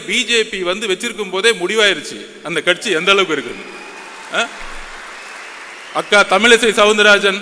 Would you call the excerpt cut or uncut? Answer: uncut